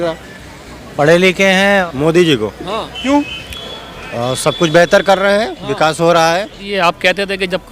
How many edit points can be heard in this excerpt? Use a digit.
2